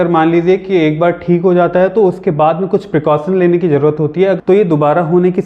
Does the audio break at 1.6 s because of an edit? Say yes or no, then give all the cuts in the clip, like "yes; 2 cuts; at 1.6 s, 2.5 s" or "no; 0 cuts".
no; 1 cut; at 4.4 s